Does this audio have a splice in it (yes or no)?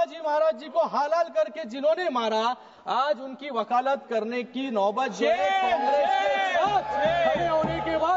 no